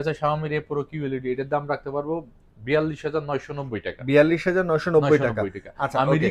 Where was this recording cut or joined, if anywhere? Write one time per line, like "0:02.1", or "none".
none